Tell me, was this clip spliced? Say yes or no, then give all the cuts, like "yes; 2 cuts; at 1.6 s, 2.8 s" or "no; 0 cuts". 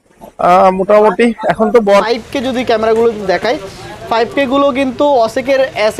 yes; 1 cut; at 2.1 s